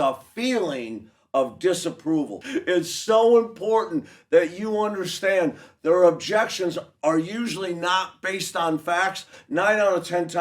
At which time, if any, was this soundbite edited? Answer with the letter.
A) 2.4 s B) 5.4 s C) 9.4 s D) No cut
A